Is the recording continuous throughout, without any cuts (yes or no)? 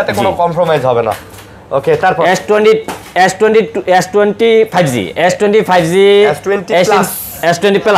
yes